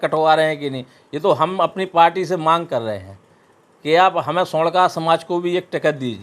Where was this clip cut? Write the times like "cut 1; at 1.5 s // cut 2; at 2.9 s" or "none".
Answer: none